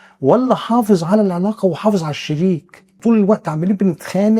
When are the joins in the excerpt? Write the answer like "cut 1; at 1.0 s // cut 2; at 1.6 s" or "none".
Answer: cut 1; at 2.8 s